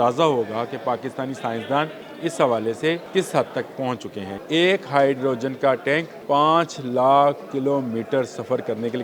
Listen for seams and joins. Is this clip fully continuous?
no; 4 cuts; at 2.0 s, 3.0 s, 4.3 s, 6.1 s

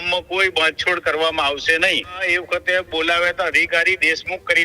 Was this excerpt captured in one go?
no; 1 cut; at 2.2 s

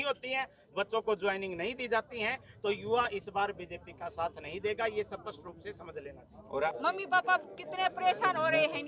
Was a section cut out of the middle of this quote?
yes; 1 cut; at 6.7 s

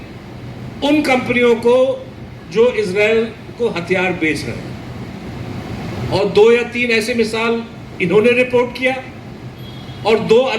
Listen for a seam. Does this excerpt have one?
no; 0 cuts

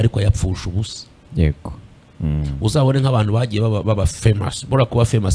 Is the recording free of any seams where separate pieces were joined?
yes; 0 cuts

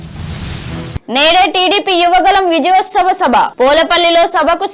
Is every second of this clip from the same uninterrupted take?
no; 1 cut; at 0.9 s

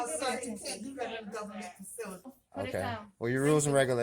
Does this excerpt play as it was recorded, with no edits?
no; 1 cut; at 2.3 s

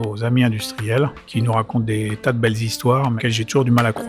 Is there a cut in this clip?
yes; 2 cuts; at 1.2 s, 3.2 s

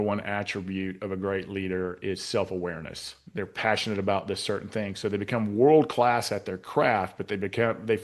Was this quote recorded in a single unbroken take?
no; 1 cut; at 3.2 s

